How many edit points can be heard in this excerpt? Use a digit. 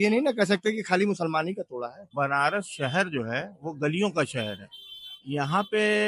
1